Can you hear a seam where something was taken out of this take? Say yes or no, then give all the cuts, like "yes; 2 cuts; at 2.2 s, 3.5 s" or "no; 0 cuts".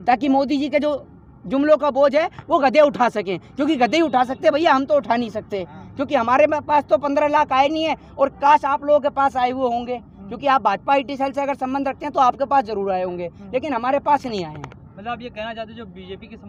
no; 0 cuts